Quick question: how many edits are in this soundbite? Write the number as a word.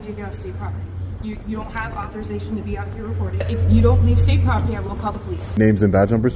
two